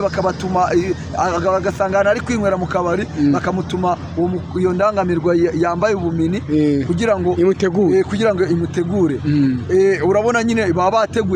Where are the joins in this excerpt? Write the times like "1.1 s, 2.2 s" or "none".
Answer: none